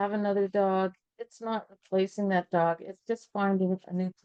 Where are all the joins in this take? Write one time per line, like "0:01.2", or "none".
none